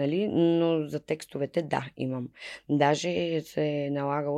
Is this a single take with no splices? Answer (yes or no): yes